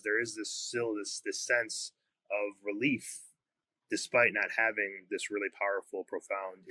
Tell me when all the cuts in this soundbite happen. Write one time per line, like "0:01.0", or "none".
none